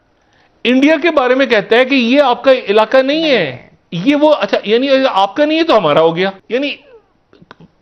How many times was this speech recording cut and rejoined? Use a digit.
1